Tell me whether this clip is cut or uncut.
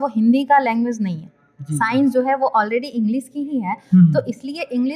uncut